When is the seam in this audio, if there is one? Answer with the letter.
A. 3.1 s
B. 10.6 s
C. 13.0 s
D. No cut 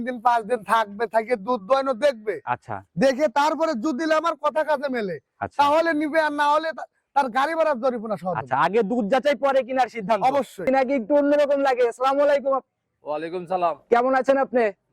B